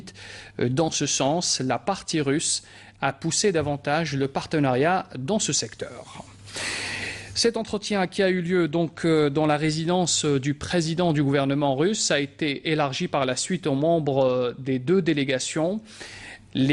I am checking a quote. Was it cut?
no; 0 cuts

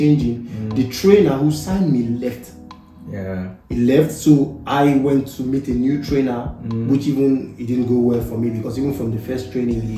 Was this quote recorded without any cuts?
yes; 0 cuts

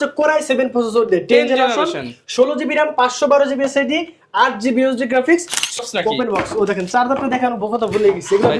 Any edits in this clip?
yes; 1 cut; at 5.8 s

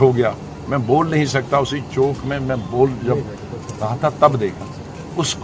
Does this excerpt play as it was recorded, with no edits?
yes; 0 cuts

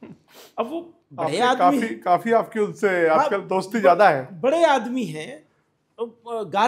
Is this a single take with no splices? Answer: yes; 0 cuts

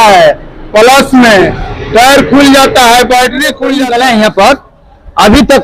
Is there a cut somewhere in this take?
yes; 1 cut; at 3.5 s

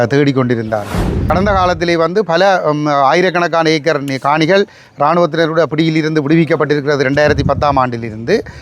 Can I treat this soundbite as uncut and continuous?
no; 1 cut; at 1.1 s

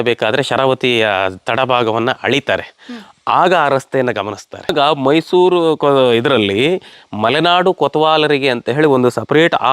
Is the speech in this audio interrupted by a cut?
yes; 1 cut; at 4.7 s

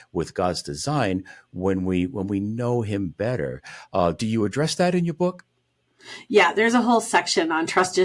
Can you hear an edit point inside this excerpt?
no; 0 cuts

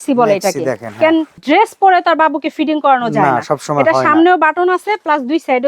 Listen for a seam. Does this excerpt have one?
yes; 1 cut; at 1.3 s

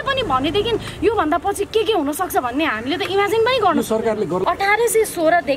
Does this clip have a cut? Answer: yes; 1 cut; at 4.4 s

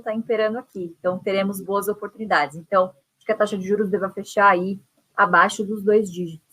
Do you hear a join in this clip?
yes; 1 cut; at 3.1 s

